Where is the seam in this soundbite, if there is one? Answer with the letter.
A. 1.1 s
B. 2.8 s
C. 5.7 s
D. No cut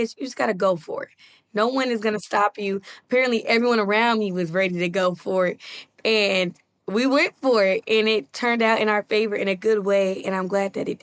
D